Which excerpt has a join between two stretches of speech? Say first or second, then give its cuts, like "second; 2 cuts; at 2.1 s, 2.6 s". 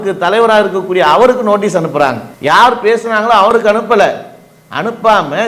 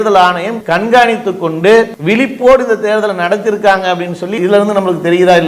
second; 1 cut; at 4.3 s